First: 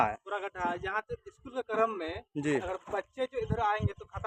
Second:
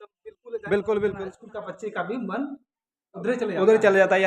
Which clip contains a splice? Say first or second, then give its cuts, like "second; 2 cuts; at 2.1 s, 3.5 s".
second; 1 cut; at 1.5 s